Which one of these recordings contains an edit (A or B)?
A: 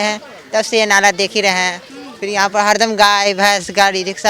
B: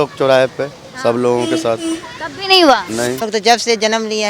B